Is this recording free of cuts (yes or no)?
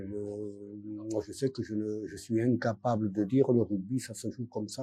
yes